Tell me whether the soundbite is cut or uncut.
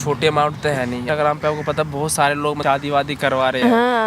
cut